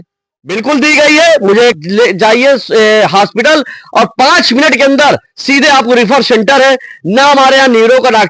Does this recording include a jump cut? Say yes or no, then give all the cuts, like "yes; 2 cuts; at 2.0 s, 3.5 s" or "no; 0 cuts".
yes; 1 cut; at 1.8 s